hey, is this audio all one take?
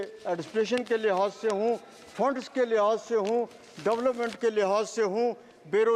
yes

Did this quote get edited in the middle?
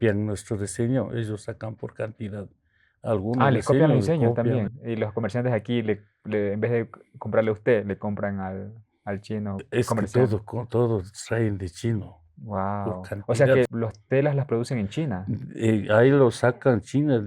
yes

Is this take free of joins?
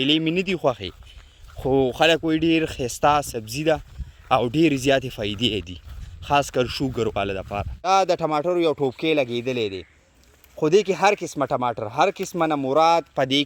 no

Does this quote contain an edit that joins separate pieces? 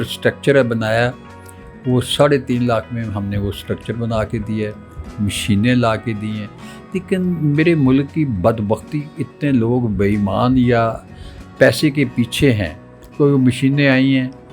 no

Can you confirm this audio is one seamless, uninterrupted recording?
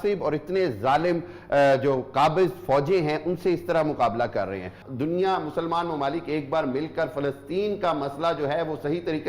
no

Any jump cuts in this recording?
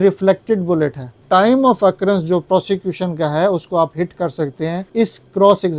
yes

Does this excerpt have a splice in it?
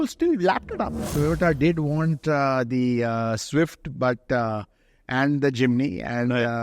yes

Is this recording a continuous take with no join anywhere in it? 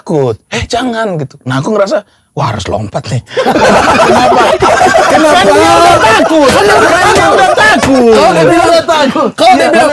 yes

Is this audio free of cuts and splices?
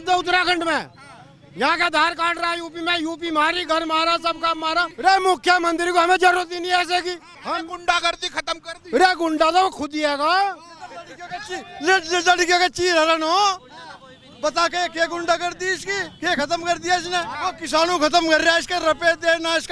no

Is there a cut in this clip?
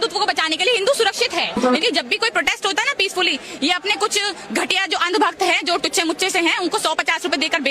yes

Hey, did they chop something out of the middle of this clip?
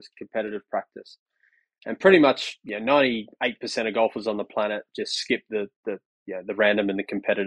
no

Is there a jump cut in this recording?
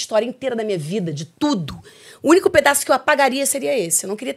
no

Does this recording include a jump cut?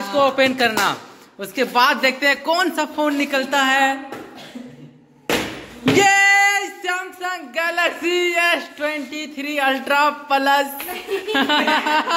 no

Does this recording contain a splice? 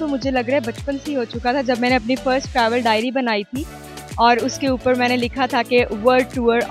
no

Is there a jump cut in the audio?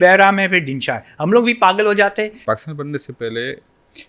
yes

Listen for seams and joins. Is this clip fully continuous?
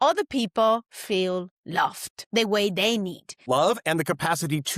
no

